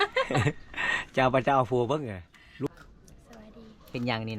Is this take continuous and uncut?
no; 1 cut; at 2.7 s

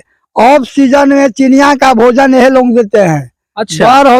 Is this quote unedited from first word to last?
yes; 0 cuts

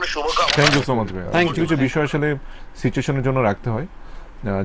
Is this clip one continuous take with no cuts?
no; 1 cut; at 1.2 s

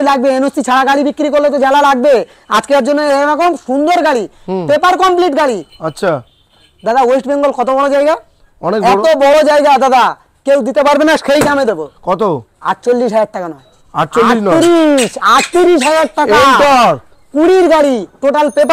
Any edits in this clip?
no; 0 cuts

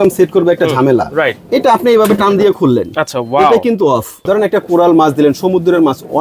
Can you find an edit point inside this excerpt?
yes; 1 cut; at 4.1 s

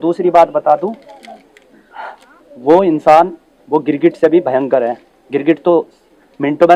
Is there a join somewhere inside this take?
no; 0 cuts

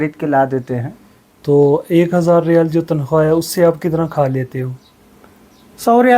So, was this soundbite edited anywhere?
no; 0 cuts

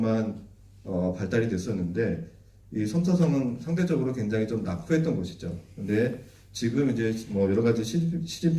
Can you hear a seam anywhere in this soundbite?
no; 0 cuts

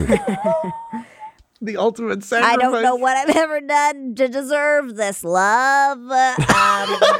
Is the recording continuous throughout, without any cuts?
no; 1 cut; at 2.4 s

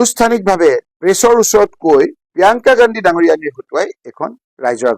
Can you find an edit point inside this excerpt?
no; 0 cuts

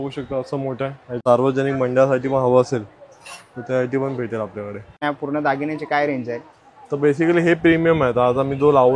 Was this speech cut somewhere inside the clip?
yes; 2 cuts; at 1.1 s, 5.0 s

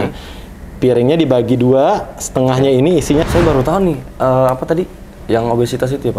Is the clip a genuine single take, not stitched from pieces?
no; 1 cut; at 3.3 s

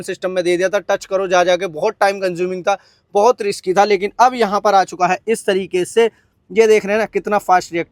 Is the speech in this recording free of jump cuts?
yes; 0 cuts

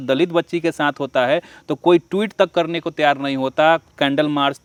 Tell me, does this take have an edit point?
no; 0 cuts

